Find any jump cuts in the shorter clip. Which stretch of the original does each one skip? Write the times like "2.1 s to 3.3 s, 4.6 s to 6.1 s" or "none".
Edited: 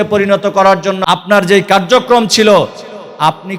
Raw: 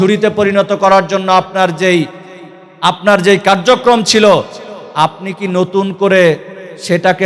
1.2 s to 2.7 s